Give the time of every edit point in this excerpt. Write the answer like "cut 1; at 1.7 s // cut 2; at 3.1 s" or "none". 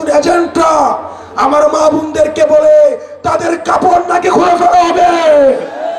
none